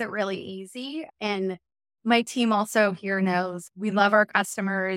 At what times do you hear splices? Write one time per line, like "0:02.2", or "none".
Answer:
0:01.1
0:03.6